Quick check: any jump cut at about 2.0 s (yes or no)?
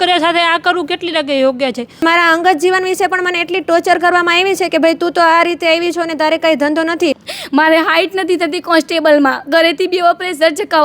yes